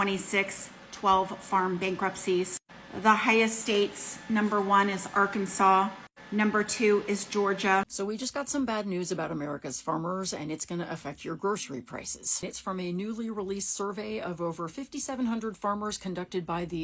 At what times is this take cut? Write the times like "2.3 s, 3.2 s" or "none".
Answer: 7.9 s